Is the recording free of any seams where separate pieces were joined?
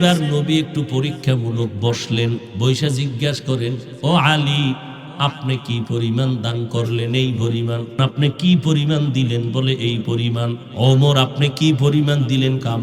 no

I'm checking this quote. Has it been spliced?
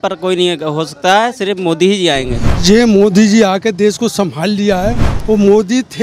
yes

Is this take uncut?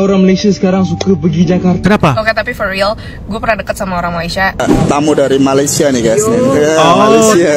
no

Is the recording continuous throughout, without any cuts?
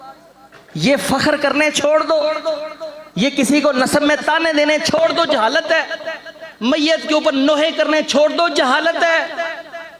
yes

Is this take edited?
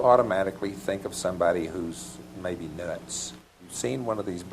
yes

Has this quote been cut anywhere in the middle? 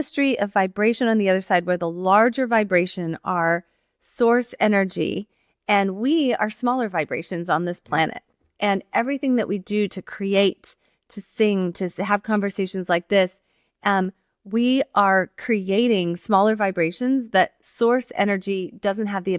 no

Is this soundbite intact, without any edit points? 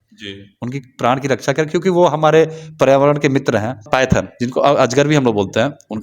no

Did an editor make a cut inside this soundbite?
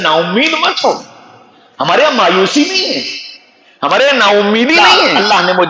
yes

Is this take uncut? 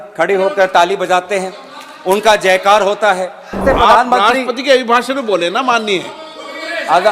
no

